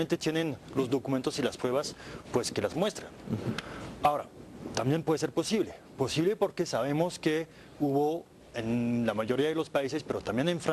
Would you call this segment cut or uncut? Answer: uncut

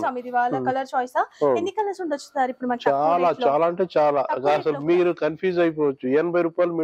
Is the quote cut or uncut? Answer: uncut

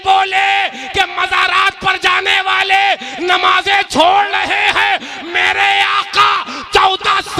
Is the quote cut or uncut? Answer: uncut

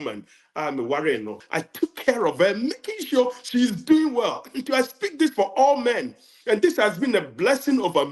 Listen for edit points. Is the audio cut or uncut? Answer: cut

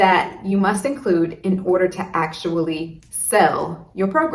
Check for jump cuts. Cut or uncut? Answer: uncut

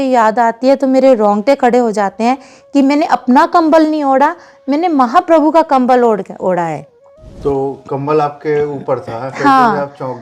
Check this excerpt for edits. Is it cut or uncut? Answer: uncut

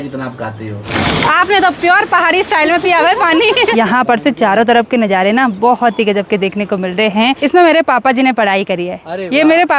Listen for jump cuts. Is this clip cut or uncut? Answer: cut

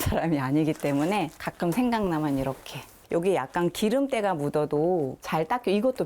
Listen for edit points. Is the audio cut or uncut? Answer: cut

